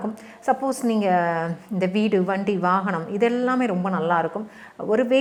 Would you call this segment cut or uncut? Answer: uncut